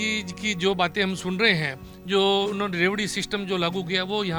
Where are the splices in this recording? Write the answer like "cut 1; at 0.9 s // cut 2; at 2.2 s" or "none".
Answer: none